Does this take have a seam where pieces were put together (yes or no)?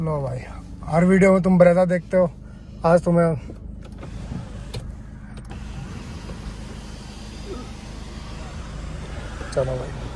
no